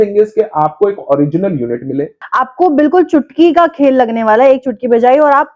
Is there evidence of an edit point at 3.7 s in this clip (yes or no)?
no